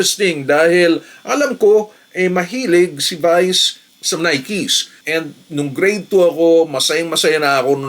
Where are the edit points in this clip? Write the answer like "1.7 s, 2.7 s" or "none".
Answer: 4.9 s